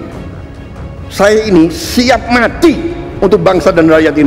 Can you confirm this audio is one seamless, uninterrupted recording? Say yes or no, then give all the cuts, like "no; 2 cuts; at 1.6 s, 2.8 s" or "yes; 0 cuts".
yes; 0 cuts